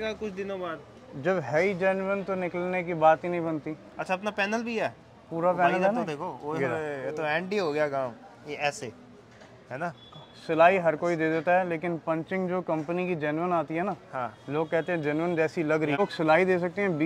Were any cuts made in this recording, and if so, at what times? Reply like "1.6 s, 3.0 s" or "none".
16.0 s